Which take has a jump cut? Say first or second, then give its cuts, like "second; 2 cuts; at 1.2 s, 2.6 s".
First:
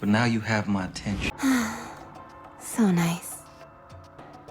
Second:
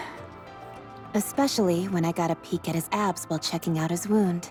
first; 1 cut; at 1.3 s